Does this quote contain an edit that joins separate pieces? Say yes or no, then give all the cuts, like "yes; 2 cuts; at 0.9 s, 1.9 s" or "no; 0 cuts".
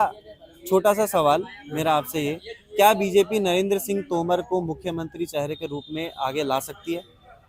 no; 0 cuts